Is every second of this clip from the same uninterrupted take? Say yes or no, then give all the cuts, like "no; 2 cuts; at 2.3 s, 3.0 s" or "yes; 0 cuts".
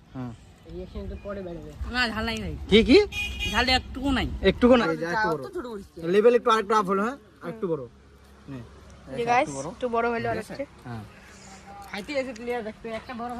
no; 1 cut; at 4.8 s